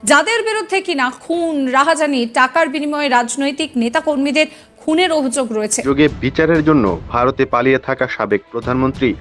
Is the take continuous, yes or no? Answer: no